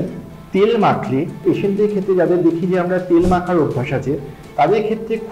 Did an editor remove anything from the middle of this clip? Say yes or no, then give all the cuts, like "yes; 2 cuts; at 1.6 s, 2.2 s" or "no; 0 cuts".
yes; 1 cut; at 1.4 s